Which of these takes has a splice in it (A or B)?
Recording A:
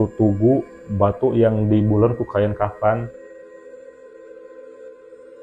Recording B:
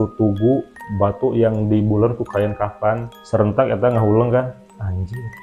B